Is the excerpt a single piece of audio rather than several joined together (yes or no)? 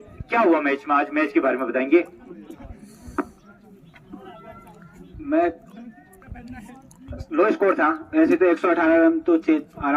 yes